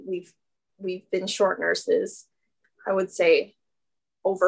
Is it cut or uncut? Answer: uncut